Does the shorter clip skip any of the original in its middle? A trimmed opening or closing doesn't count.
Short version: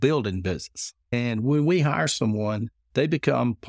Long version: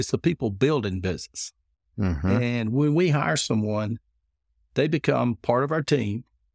yes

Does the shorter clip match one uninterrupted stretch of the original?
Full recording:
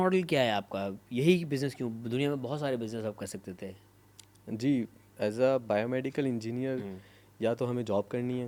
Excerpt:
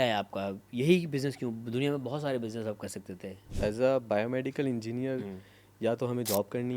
no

